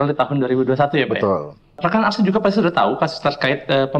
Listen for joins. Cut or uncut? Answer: cut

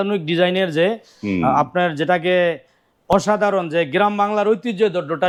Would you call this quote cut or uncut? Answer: uncut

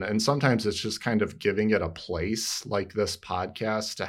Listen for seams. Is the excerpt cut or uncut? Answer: uncut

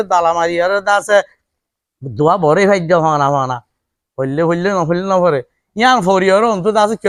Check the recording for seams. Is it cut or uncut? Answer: uncut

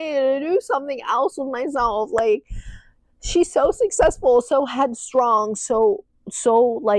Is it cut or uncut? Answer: uncut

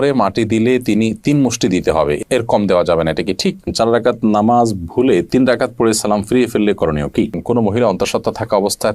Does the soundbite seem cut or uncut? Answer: cut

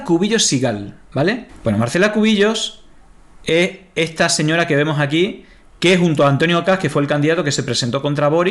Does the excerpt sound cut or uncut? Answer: cut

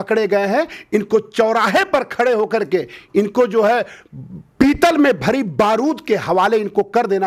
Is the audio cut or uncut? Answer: uncut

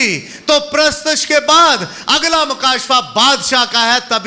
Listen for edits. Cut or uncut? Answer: uncut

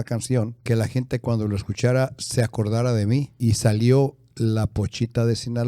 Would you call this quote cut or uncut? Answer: cut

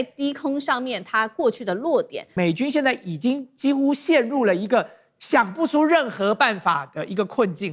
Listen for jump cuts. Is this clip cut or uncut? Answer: cut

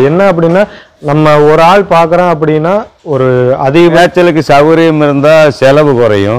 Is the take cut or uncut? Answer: cut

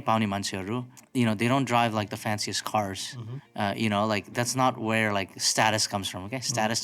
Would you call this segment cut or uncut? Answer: cut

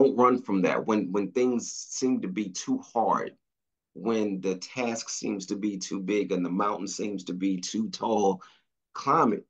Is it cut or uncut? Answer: uncut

